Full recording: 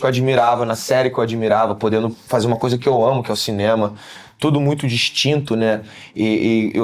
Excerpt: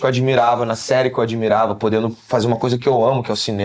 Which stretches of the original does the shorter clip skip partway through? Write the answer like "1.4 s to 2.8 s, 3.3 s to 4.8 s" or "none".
none